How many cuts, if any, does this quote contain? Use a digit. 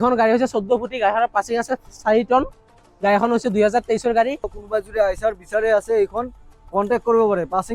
1